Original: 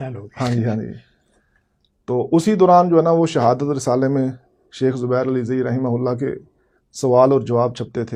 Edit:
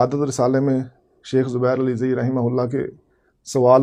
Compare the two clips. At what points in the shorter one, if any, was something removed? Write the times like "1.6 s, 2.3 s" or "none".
none